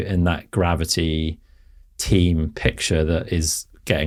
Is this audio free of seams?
yes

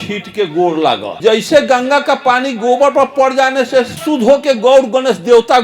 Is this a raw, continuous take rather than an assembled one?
no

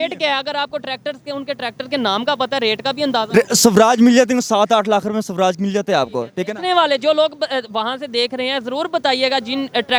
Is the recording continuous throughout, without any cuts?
yes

